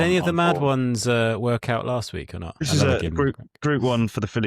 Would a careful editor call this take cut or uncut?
cut